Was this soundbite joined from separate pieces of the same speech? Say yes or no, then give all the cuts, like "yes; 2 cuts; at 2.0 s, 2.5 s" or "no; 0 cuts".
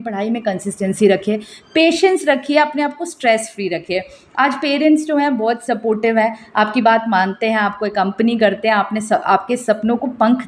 no; 0 cuts